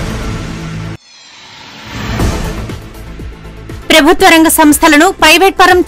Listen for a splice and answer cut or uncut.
cut